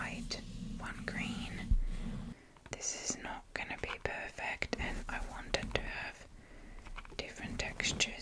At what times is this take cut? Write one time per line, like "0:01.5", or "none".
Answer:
0:02.3